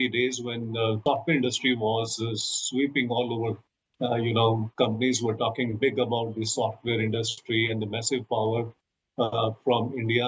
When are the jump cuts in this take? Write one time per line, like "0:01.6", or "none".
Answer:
0:01.0
0:03.8